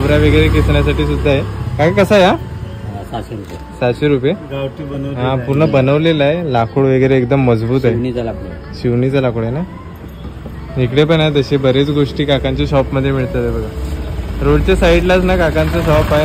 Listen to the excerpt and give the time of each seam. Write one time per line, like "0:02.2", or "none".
none